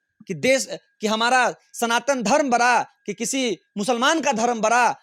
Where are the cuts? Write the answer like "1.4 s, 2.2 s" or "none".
none